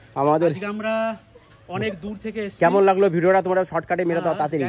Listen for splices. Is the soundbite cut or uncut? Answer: uncut